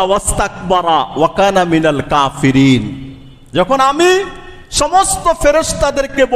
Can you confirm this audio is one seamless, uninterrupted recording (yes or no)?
yes